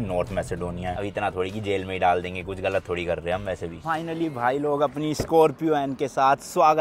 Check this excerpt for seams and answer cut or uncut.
cut